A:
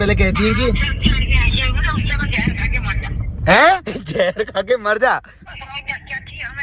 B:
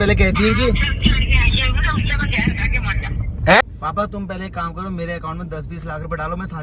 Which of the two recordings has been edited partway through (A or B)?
B